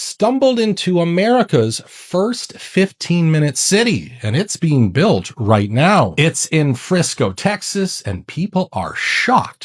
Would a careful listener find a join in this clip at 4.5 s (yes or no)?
no